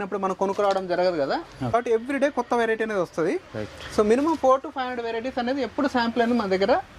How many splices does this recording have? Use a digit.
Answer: 1